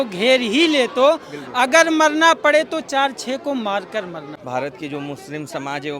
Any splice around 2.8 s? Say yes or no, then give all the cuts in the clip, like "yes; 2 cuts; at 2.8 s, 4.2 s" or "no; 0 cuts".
no; 1 cut; at 4.3 s